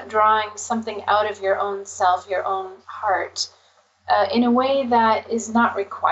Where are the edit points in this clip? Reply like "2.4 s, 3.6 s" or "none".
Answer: 2.8 s